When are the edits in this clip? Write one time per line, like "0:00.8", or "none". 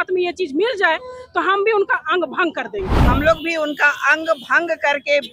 0:03.0